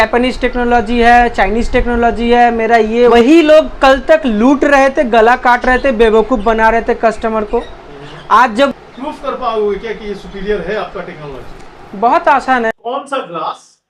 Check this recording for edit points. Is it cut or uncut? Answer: cut